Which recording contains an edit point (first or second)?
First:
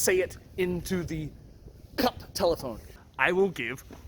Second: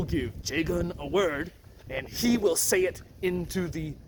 first